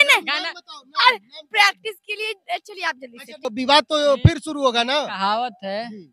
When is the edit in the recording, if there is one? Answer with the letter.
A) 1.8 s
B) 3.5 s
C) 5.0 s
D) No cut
B